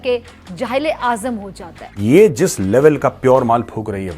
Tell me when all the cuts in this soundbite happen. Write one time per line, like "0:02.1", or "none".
0:01.8